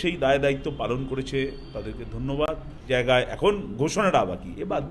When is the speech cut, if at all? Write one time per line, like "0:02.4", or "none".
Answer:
0:02.8